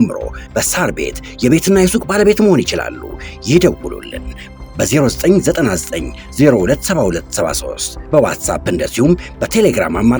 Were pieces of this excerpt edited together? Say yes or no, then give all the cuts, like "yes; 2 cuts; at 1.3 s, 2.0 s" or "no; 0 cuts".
no; 0 cuts